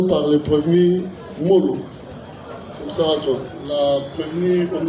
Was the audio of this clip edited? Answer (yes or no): yes